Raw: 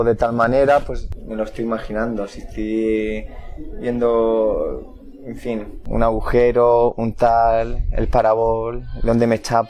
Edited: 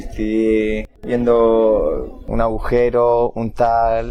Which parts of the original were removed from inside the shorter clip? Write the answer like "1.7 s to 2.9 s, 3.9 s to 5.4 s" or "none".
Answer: 3.3 s to 3.7 s, 4.9 s to 5.8 s